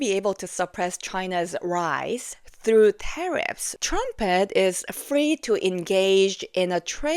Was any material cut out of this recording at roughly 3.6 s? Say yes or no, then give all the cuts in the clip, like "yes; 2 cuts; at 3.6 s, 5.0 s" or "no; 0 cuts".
yes; 1 cut; at 3.6 s